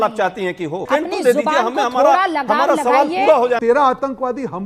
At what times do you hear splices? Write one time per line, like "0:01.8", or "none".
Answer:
0:00.9
0:03.6